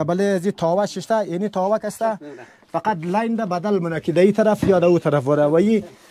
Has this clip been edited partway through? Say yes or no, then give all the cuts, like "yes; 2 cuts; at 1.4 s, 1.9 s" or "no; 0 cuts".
no; 0 cuts